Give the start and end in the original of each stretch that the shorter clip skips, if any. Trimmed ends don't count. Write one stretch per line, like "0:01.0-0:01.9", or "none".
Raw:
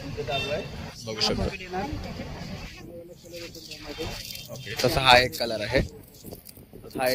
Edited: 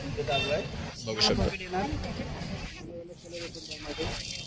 none